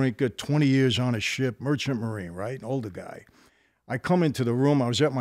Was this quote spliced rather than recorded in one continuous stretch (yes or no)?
no